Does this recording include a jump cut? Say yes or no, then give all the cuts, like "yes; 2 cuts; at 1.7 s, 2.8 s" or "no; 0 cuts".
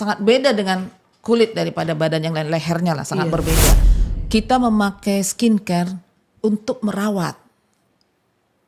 yes; 1 cut; at 3.8 s